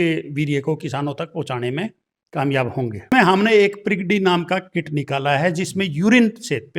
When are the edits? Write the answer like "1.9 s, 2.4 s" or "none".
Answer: 3.1 s